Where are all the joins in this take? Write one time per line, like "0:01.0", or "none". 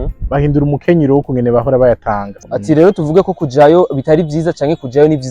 0:02.4

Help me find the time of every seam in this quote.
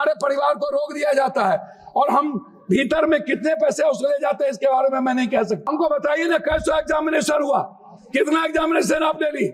0:05.7

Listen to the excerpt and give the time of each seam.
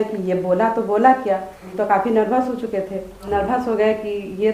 0:01.6
0:03.3

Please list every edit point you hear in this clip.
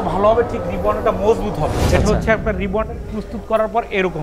0:01.8

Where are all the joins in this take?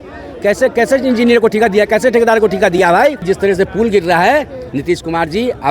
0:03.2

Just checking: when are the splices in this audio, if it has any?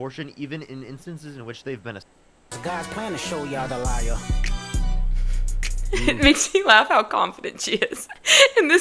0:02.5

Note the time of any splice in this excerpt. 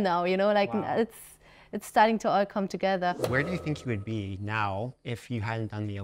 0:03.2

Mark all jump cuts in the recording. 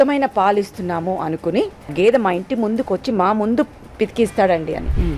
0:01.9

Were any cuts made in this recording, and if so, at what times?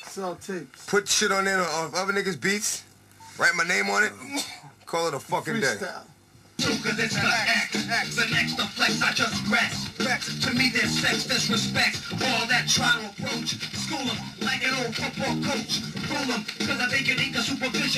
0:10.3

